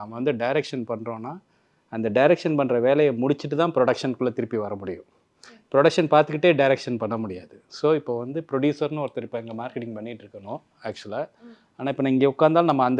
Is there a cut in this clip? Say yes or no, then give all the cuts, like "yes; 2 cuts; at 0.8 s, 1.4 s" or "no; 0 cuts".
no; 0 cuts